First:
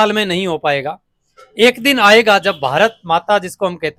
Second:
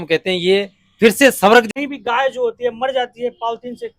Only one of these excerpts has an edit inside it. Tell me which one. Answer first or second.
second